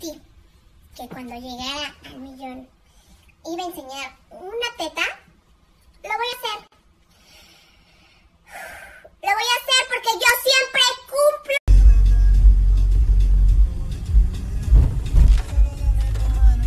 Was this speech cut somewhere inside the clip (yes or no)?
yes